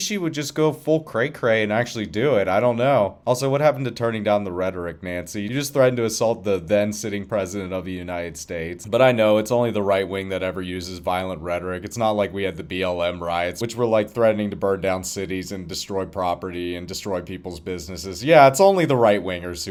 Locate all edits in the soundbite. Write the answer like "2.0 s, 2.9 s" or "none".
none